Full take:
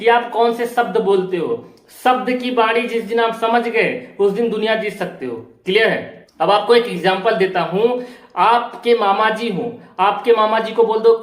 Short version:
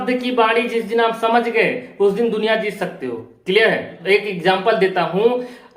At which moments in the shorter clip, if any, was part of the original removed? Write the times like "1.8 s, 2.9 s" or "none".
4.2 s